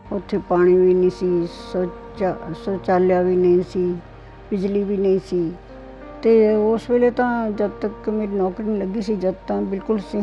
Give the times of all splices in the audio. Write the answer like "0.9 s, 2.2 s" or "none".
5.6 s